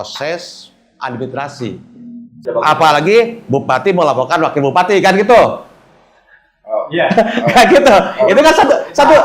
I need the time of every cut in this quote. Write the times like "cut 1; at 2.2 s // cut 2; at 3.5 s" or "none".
cut 1; at 2.4 s